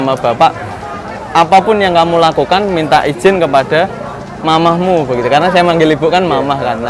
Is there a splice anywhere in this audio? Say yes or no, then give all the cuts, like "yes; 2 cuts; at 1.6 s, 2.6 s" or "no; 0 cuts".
no; 0 cuts